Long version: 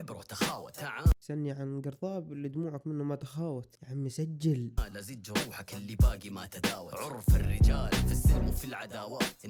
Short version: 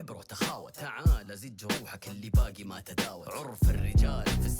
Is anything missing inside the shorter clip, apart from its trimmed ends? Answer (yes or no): yes